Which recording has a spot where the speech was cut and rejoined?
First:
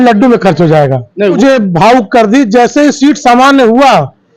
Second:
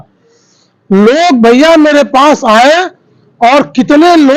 first; 1 cut; at 1.4 s

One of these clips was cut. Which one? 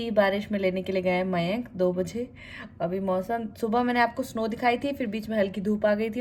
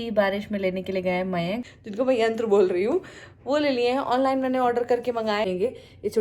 second; 2 cuts; at 1.7 s, 5.5 s

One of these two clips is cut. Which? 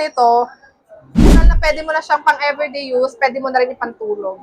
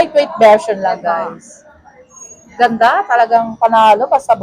first; 1 cut; at 1.3 s

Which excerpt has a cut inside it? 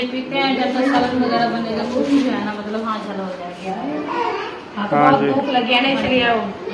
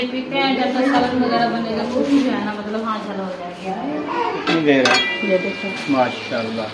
second; 1 cut; at 4.4 s

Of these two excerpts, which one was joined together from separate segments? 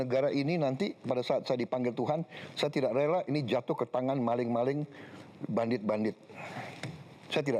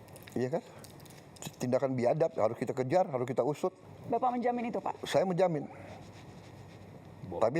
second; 1 cut; at 3.9 s

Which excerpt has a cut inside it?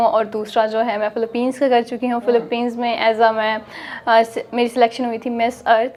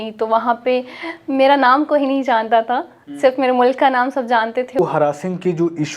second; 1 cut; at 4.8 s

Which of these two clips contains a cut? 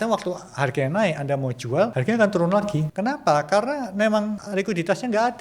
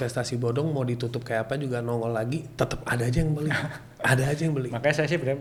first; 3 cuts; at 2.0 s, 2.9 s, 4.4 s

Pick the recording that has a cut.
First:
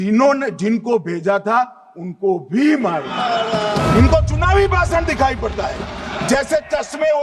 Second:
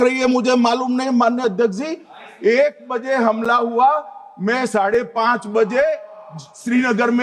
first; 1 cut; at 3.8 s

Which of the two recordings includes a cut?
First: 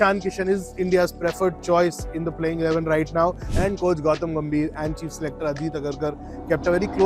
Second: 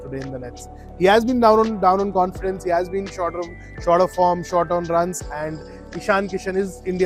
first; 1 cut; at 3.5 s

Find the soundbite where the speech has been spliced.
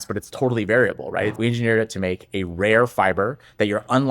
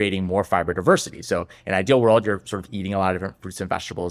first; 1 cut; at 1.3 s

